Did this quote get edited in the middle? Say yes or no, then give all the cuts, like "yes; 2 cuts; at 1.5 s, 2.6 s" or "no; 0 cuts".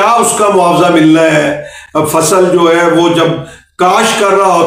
no; 0 cuts